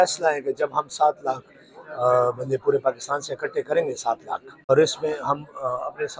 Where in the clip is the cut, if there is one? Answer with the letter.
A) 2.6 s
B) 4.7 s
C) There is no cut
B